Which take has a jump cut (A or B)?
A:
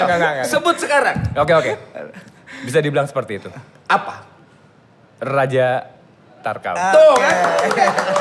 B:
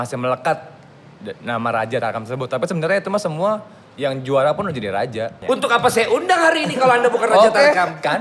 B